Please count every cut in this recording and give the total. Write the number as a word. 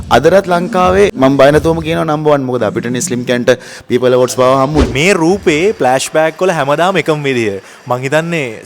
two